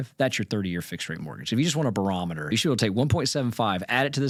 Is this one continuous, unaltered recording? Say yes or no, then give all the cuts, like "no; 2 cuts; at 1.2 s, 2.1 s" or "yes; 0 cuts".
yes; 0 cuts